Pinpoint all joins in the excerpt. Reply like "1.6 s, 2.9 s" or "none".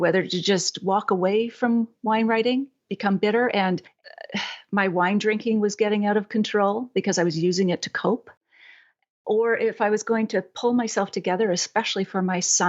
none